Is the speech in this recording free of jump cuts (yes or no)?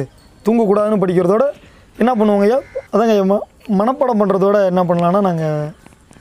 no